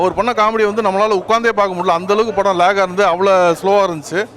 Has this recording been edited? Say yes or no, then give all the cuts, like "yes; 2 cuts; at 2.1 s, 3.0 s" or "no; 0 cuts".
no; 0 cuts